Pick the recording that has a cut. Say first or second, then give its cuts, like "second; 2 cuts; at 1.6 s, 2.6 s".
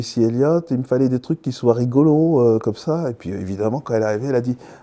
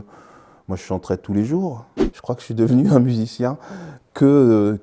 second; 1 cut; at 2.0 s